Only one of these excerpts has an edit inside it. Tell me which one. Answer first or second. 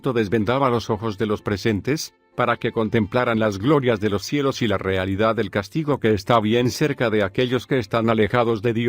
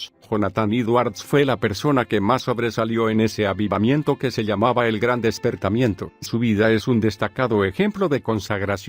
first